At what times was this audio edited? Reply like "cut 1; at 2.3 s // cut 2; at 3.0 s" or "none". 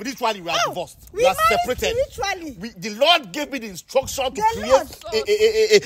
none